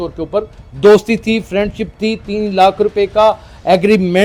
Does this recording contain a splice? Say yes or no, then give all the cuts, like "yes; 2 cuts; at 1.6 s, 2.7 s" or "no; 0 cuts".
no; 0 cuts